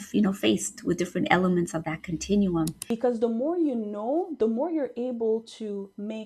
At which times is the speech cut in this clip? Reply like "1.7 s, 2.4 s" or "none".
2.8 s